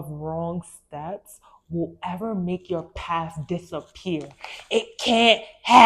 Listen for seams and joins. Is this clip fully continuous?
yes; 0 cuts

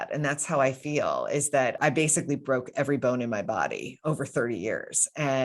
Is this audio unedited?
no; 1 cut; at 1.8 s

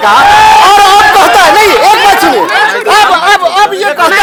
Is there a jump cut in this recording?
no; 0 cuts

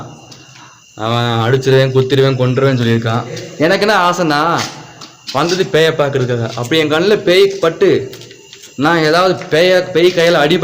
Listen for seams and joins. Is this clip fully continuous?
no; 1 cut; at 3.4 s

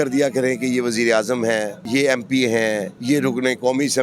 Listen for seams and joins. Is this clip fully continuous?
no; 2 cuts; at 1.8 s, 2.9 s

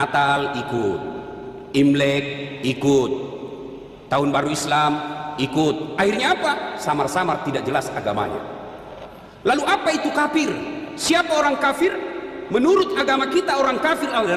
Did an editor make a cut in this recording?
no; 0 cuts

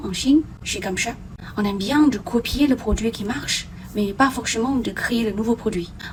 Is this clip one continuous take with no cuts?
yes; 0 cuts

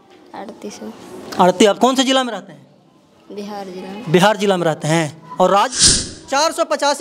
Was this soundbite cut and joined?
yes; 1 cut; at 6.1 s

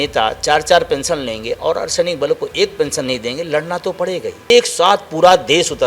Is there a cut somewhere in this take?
yes; 1 cut; at 4.5 s

